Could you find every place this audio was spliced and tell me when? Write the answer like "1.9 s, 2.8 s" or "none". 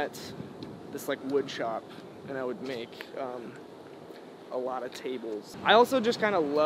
5.5 s